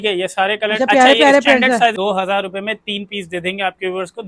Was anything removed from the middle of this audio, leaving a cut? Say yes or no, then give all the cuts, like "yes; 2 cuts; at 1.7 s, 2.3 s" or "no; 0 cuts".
yes; 1 cut; at 1.9 s